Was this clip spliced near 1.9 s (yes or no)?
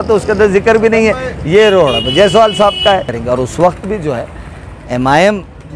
no